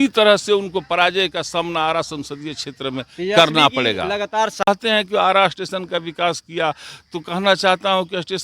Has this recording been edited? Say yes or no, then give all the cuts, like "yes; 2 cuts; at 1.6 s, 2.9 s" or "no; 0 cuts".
yes; 1 cut; at 4.7 s